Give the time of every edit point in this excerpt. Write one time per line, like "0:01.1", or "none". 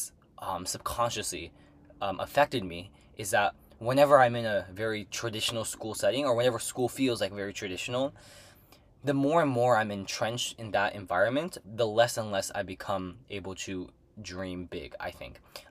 none